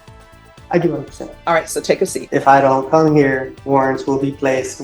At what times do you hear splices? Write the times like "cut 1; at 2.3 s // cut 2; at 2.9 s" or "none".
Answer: cut 1; at 2.2 s // cut 2; at 3.5 s